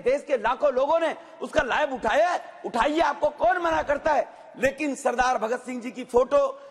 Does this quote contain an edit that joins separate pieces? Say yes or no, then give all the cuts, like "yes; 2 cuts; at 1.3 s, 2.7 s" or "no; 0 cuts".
no; 0 cuts